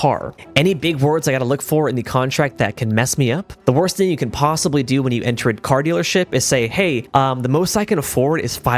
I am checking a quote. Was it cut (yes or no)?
yes